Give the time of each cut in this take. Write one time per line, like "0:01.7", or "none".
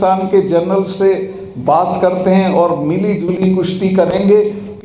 none